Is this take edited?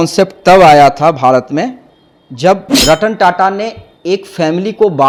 no; 0 cuts

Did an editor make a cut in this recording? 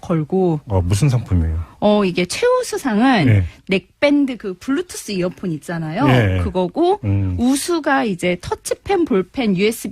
yes; 1 cut; at 7.3 s

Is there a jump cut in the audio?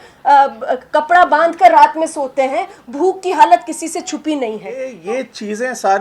yes; 1 cut; at 5.0 s

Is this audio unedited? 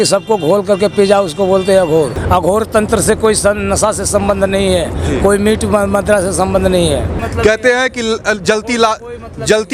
no; 2 cuts; at 2.2 s, 7.2 s

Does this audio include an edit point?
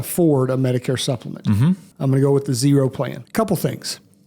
yes; 2 cuts; at 1.9 s, 3.2 s

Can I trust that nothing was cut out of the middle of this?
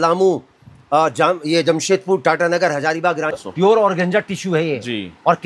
no; 1 cut; at 3.4 s

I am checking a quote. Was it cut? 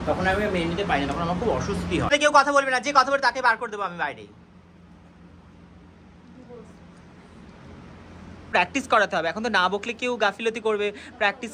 yes; 2 cuts; at 2.1 s, 8.5 s

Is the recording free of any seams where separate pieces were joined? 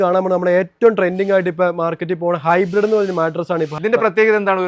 no; 1 cut; at 3.7 s

